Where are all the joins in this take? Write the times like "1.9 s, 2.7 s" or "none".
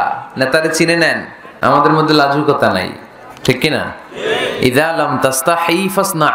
1.6 s